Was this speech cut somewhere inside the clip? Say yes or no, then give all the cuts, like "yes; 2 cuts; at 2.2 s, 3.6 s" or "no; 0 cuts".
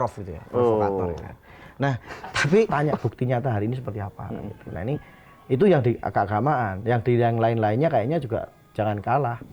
yes; 1 cut; at 2.7 s